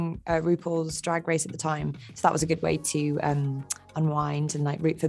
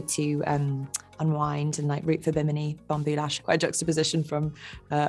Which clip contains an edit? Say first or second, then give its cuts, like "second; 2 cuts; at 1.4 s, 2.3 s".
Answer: second; 1 cut; at 3.3 s